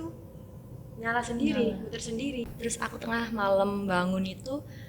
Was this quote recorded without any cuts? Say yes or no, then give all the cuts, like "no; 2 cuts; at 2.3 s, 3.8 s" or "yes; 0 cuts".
no; 1 cut; at 2.5 s